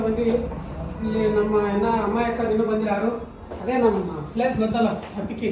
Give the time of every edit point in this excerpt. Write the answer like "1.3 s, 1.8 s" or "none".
none